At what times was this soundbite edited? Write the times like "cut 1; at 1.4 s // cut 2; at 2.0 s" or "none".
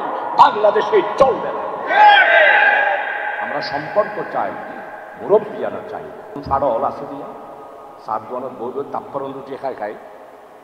cut 1; at 6.4 s